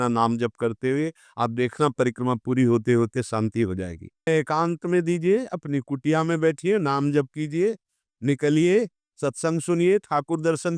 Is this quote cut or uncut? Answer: cut